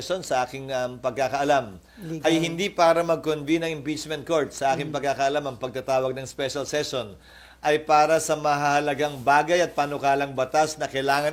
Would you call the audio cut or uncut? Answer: uncut